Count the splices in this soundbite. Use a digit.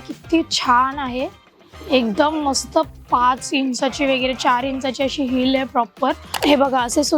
1